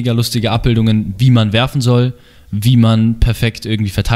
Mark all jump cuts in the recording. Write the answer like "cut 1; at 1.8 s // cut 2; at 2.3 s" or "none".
none